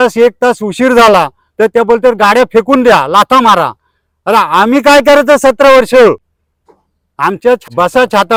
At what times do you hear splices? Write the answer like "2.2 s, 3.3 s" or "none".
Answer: none